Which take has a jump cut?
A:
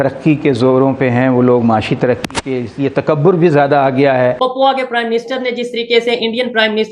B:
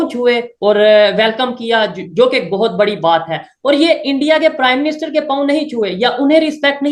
A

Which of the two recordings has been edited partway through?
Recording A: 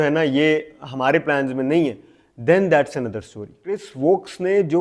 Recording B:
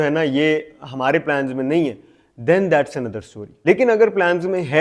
A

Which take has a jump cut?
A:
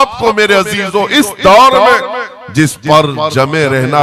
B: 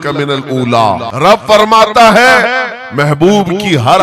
B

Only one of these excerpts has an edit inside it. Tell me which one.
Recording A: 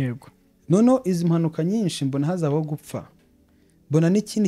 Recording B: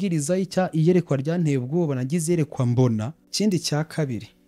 B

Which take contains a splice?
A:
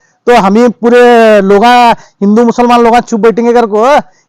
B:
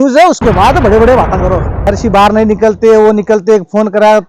B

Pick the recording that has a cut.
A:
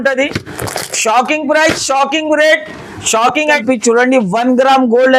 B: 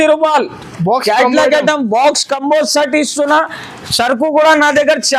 A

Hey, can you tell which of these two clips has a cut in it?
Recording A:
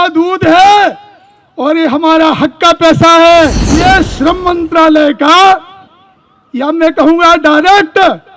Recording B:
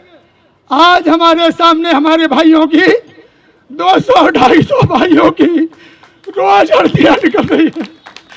A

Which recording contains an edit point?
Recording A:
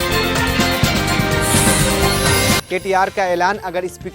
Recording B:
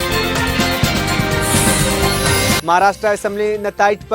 A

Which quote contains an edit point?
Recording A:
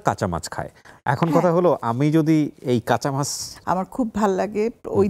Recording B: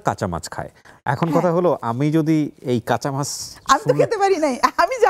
A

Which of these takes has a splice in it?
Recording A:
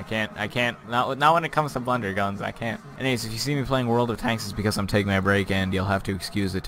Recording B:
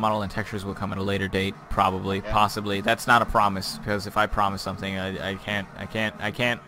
A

